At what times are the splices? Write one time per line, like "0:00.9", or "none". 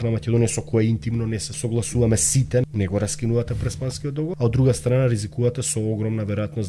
0:01.5
0:02.6
0:04.4

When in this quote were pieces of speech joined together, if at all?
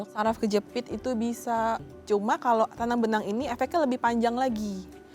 0:01.9

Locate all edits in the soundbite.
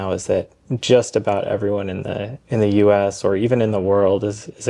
none

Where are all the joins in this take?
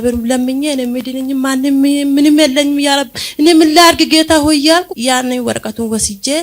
0:04.9

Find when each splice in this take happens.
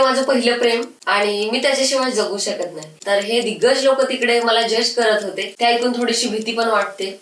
0:00.9
0:02.9
0:05.4

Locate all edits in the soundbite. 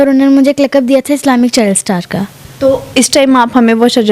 0:02.4

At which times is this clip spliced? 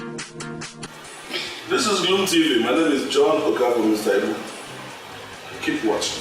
0:01.1

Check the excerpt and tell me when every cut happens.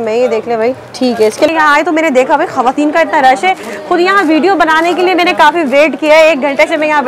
0:01.5

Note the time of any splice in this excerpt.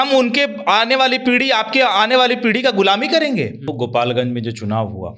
0:03.7

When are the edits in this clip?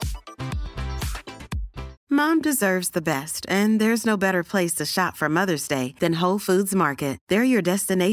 0:01.9

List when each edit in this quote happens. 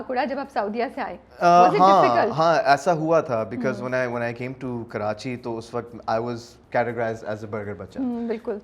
none

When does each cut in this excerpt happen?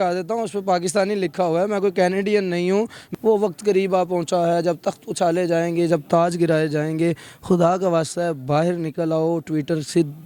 0:03.0

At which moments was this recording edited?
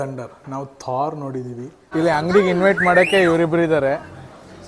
0:01.8

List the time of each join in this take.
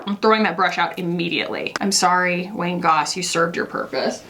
0:01.7

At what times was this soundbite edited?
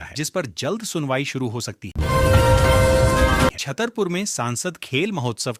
none

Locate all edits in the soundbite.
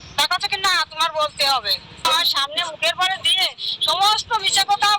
0:01.9

